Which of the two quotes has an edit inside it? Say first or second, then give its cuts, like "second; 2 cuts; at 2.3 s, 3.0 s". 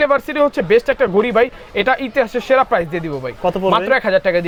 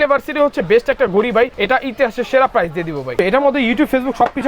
second; 2 cuts; at 1.6 s, 3.1 s